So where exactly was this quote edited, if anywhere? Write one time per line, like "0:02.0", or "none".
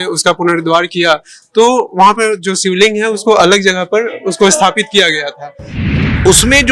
0:05.8